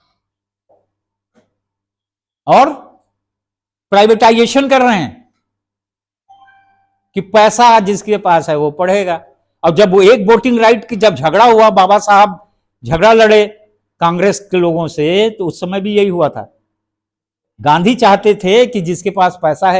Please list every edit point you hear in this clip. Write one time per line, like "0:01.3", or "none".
none